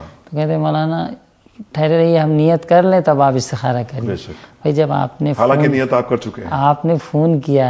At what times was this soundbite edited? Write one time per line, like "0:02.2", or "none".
none

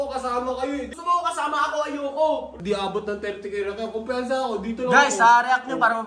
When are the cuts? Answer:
0:00.9
0:02.5

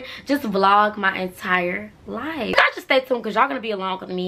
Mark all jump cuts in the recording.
0:02.6

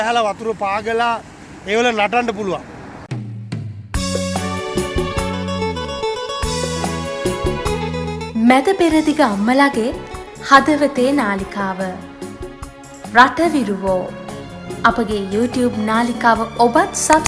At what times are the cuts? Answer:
0:02.9

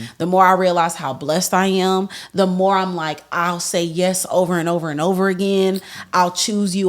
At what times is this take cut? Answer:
none

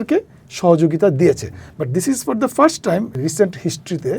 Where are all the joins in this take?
0:03.2

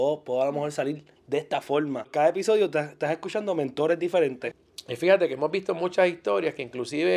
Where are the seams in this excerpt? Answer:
0:02.1
0:04.4

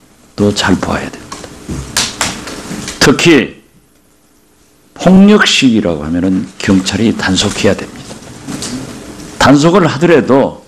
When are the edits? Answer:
0:03.2

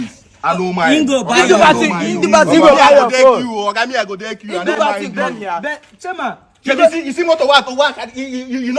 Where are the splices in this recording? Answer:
none

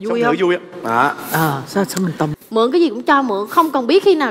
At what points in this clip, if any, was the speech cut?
0:02.3

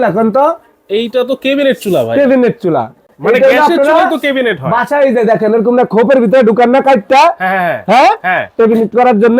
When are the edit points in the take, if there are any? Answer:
none

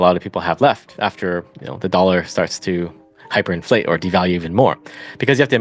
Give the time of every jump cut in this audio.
none

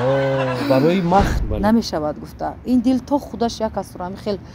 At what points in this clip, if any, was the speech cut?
0:01.4

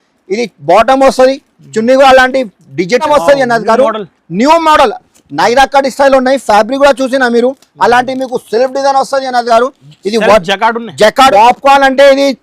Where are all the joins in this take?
0:03.0
0:11.3

